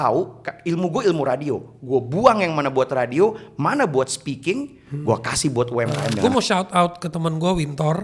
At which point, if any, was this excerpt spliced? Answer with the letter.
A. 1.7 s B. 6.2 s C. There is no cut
B